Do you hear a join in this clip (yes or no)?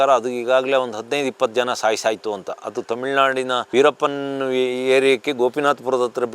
yes